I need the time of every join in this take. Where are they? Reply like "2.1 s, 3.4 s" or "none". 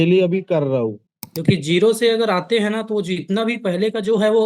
1.0 s